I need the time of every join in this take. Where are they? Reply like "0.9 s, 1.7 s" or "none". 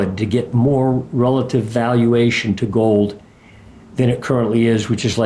none